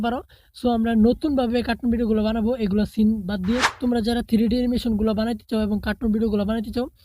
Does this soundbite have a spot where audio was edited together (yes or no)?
yes